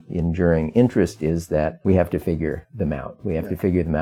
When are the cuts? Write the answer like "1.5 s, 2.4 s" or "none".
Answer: 1.8 s

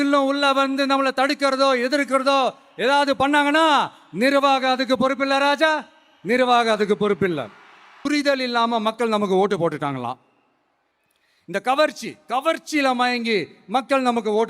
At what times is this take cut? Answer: 7.9 s

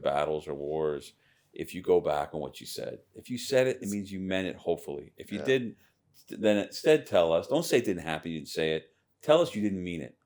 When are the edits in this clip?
none

